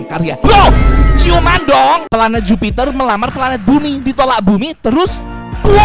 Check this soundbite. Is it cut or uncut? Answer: cut